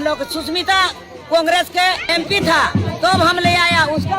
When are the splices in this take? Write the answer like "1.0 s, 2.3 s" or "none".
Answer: 2.1 s